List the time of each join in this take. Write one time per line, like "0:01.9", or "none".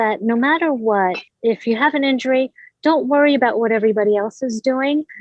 0:01.3